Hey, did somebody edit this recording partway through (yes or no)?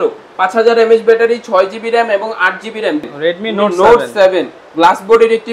yes